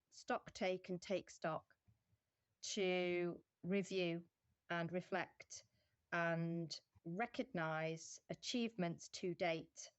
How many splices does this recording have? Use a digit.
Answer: 1